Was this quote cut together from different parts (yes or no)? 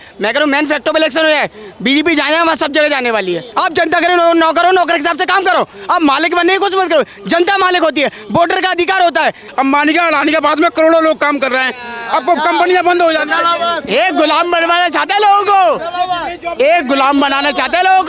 yes